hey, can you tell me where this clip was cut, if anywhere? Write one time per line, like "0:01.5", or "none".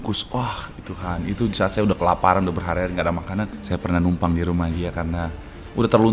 0:03.6